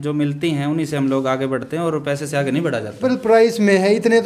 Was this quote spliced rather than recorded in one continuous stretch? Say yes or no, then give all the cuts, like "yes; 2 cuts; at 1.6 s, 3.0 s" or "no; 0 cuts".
yes; 1 cut; at 3.0 s